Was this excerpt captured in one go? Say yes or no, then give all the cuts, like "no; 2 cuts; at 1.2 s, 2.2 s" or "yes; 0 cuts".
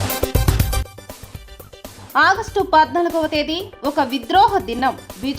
no; 1 cut; at 1.9 s